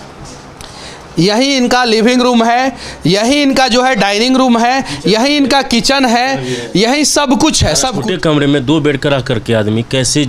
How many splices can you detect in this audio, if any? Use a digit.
1